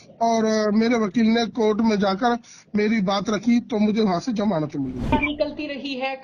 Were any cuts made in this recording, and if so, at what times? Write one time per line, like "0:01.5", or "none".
0:05.1